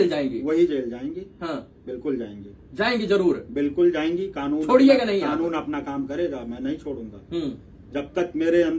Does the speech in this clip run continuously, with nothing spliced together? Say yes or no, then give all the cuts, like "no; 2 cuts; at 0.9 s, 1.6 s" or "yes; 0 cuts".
yes; 0 cuts